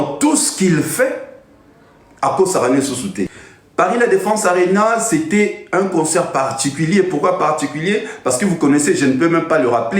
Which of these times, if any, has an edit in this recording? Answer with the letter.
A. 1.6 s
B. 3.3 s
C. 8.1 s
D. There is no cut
B